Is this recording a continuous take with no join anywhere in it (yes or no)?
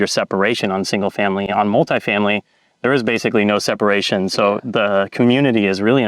yes